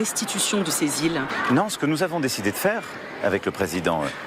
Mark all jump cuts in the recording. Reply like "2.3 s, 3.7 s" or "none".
1.3 s